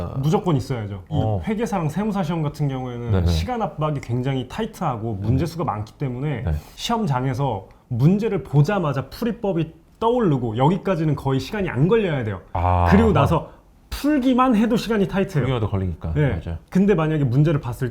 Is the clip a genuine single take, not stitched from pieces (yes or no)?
no